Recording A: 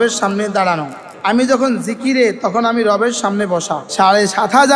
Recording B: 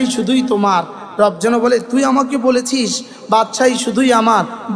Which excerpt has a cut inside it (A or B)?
A